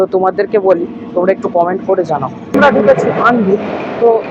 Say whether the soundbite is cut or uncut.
cut